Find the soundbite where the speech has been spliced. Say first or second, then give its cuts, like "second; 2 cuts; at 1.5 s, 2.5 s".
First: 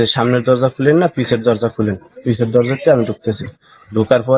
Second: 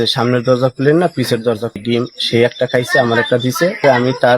second; 1 cut; at 1.8 s